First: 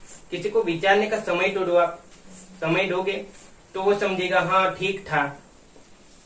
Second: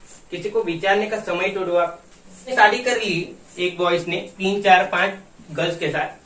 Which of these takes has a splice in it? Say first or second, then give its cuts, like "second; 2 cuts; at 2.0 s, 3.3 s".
second; 1 cut; at 2.4 s